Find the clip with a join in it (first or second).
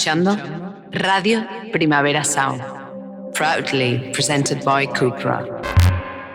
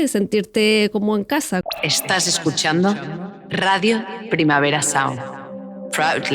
second